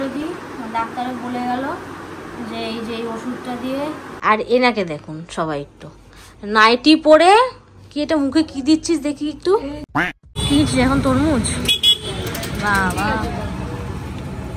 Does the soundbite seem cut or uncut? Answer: cut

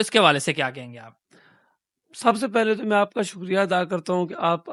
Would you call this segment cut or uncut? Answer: uncut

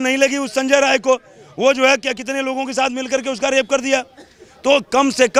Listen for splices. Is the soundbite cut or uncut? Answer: uncut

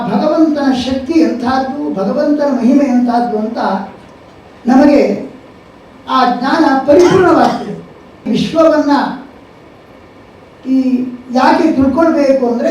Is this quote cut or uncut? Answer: cut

